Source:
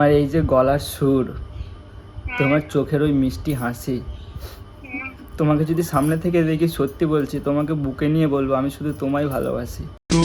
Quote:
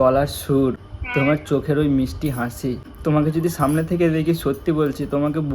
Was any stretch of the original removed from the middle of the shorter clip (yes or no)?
yes